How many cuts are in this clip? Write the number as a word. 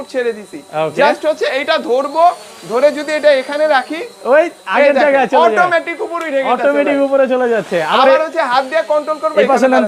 zero